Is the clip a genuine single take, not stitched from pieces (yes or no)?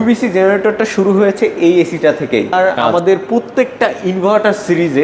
no